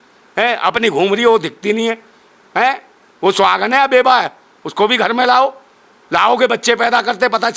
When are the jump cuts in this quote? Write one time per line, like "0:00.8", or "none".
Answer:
none

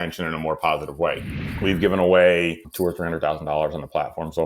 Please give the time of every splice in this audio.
0:01.3
0:02.6

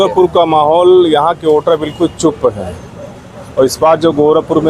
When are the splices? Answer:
none

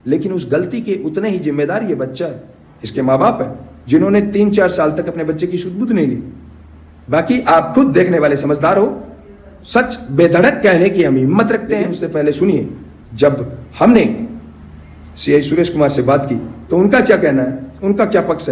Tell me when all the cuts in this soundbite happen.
0:12.0

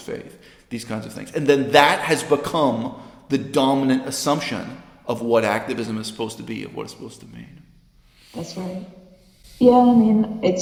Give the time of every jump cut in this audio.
none

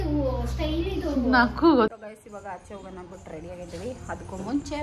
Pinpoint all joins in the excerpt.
0:02.0

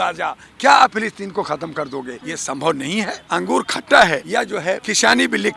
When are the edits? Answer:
0:02.2
0:03.2
0:04.5

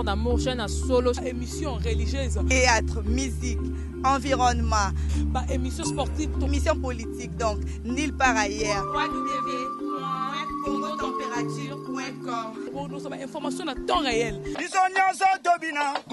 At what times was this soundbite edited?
none

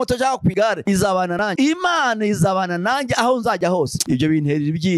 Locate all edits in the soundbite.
0:01.6

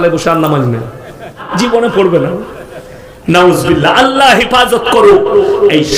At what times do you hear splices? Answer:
0:01.5

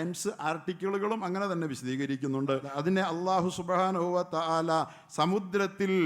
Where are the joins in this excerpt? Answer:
0:02.7

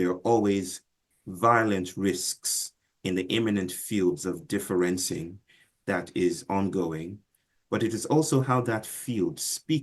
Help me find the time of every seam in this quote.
0:07.6

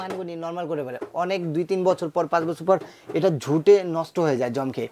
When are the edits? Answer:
none

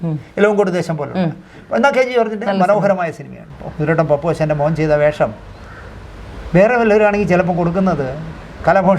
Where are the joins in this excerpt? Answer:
0:03.5

